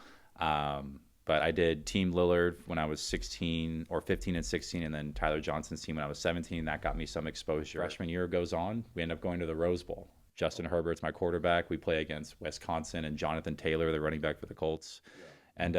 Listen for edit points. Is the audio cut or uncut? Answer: cut